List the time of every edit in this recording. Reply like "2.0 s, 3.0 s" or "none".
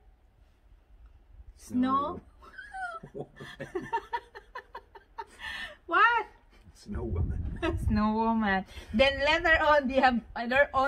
none